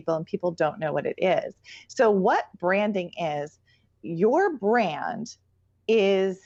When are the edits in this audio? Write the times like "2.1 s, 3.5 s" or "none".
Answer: none